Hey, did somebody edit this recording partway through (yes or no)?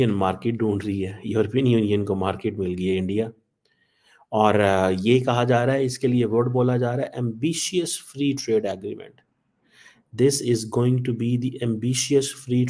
no